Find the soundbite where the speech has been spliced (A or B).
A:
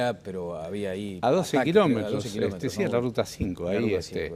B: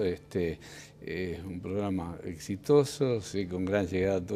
A